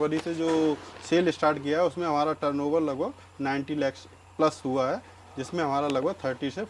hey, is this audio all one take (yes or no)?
yes